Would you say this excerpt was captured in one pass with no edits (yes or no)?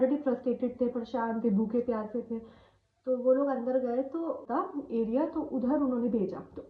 no